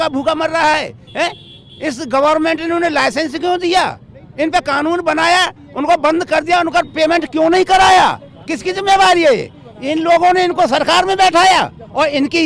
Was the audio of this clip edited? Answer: no; 0 cuts

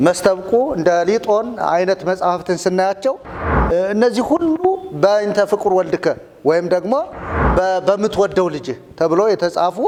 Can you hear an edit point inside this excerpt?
no; 0 cuts

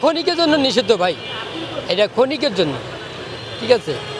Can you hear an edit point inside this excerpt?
no; 0 cuts

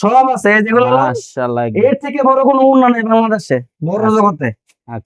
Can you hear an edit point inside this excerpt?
no; 0 cuts

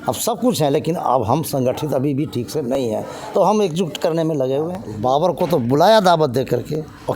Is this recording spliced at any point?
yes; 1 cut; at 4.8 s

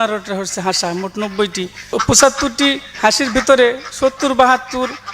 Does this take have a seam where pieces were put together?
yes; 1 cut; at 1.9 s

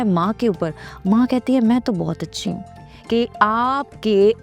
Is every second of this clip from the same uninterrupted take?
no; 1 cut; at 2.9 s

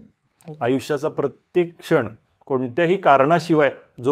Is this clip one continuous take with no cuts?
yes; 0 cuts

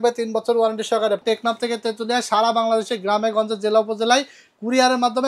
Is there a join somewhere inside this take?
yes; 1 cut; at 1.2 s

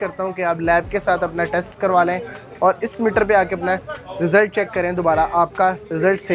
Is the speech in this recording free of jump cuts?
yes; 0 cuts

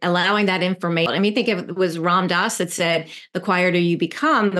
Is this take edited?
yes; 1 cut; at 1.1 s

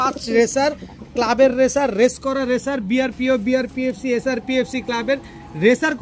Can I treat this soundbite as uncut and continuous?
yes; 0 cuts

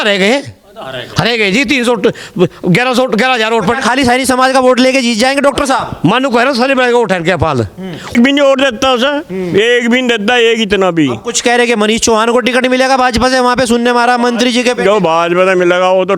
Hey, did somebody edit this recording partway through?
yes; 1 cut; at 8.1 s

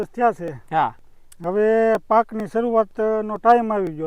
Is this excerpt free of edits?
yes; 0 cuts

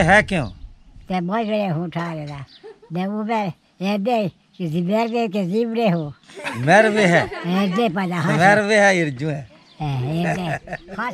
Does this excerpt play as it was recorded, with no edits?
yes; 0 cuts

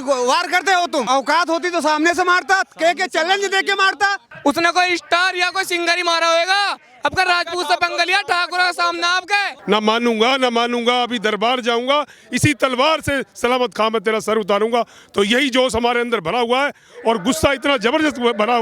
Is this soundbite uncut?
no; 3 cuts; at 1.1 s, 4.3 s, 9.5 s

